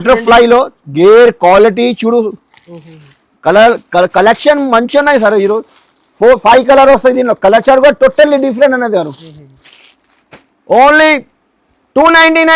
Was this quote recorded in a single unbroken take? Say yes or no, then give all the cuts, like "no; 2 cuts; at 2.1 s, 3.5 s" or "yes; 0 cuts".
yes; 0 cuts